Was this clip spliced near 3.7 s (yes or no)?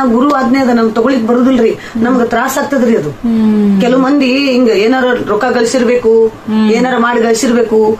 no